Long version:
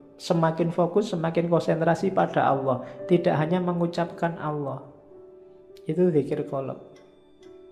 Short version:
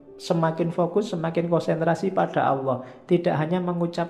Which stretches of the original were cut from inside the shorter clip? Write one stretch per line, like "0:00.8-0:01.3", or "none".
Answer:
none